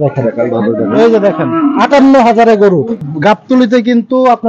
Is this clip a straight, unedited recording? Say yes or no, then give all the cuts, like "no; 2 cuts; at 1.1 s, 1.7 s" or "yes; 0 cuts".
no; 1 cut; at 3.0 s